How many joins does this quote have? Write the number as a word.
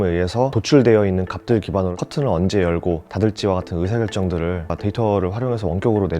one